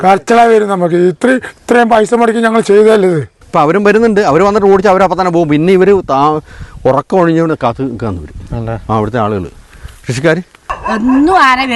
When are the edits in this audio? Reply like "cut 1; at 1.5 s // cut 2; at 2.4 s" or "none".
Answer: cut 1; at 3.4 s // cut 2; at 10.8 s